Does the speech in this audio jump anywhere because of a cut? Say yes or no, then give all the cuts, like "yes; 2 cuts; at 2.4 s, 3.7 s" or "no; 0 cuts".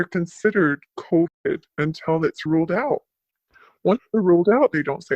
yes; 1 cut; at 0.9 s